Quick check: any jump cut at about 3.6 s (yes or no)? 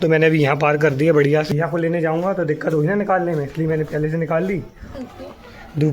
no